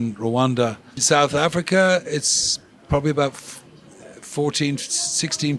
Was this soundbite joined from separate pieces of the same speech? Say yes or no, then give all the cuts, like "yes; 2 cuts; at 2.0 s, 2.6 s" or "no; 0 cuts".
yes; 1 cut; at 0.9 s